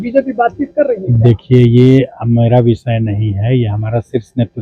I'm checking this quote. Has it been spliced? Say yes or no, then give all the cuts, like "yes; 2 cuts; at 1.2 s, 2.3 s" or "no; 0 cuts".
no; 0 cuts